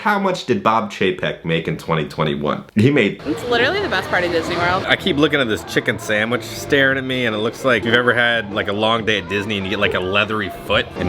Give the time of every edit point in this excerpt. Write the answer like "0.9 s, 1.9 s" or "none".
3.2 s, 4.8 s